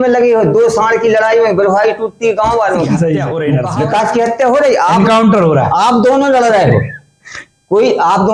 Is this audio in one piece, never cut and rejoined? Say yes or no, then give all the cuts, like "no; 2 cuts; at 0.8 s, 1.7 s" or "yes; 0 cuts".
no; 1 cut; at 3.4 s